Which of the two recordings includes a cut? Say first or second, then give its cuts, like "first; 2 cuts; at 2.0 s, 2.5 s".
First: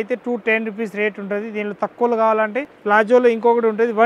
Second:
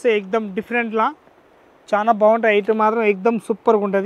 first; 1 cut; at 2.7 s